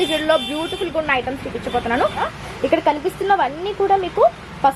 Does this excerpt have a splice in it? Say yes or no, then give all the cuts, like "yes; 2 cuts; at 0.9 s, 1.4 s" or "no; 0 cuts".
yes; 1 cut; at 2.3 s